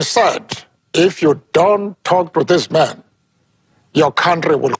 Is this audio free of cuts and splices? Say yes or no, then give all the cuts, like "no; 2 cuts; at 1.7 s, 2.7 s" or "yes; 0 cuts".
yes; 0 cuts